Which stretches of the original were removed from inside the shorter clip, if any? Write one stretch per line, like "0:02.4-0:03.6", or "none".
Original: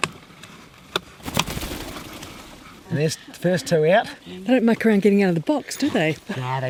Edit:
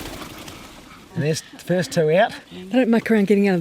none